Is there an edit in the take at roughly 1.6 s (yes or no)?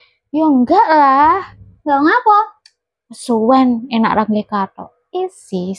no